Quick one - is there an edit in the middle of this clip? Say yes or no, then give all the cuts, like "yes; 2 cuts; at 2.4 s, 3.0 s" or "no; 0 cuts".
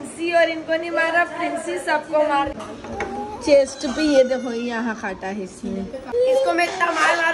yes; 2 cuts; at 2.5 s, 6.1 s